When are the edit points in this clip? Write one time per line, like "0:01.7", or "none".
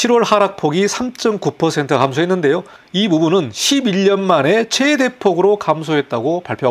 none